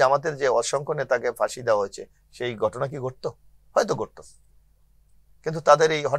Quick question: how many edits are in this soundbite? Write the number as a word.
zero